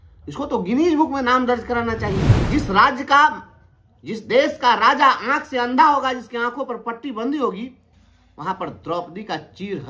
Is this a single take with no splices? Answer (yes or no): no